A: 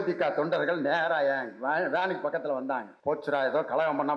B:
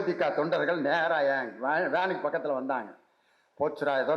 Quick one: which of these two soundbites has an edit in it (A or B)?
A